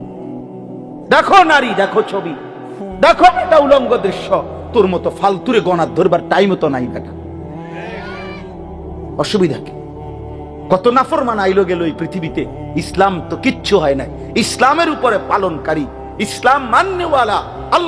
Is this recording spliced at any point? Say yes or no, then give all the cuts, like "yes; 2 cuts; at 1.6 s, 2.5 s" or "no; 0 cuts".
yes; 1 cut; at 1.1 s